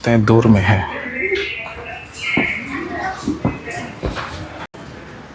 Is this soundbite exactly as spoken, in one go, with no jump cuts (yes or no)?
yes